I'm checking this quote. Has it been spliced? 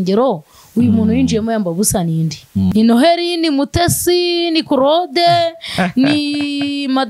yes; 1 cut; at 2.7 s

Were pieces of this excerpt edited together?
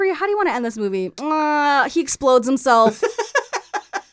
yes; 1 cut; at 1.1 s

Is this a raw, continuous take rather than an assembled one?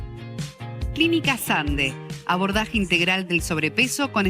no; 1 cut; at 0.9 s

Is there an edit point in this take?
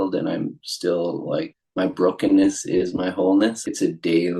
yes; 2 cuts; at 1.6 s, 3.6 s

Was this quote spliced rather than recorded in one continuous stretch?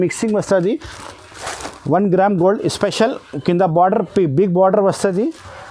yes; 1 cut; at 1.0 s

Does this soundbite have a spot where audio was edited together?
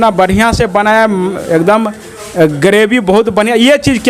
no; 0 cuts

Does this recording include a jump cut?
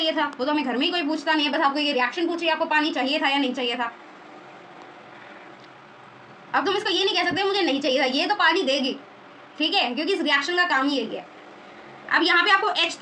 no; 0 cuts

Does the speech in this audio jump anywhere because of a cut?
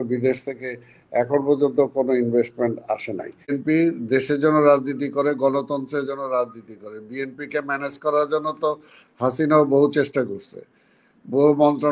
yes; 1 cut; at 3.5 s

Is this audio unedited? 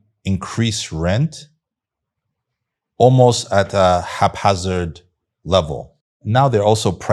no; 1 cut; at 6.1 s

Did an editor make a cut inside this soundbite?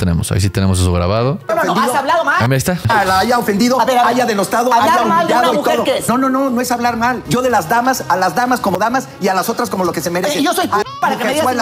yes; 1 cut; at 8.8 s

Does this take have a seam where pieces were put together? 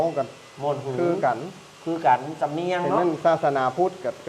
no; 0 cuts

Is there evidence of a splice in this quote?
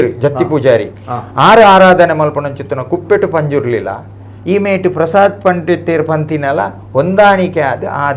no; 0 cuts

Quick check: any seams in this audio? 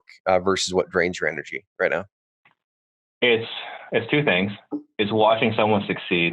no; 0 cuts

